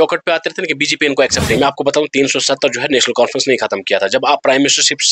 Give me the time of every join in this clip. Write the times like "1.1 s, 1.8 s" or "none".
1.6 s